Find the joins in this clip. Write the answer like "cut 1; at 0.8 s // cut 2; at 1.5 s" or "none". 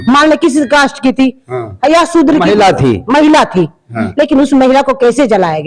none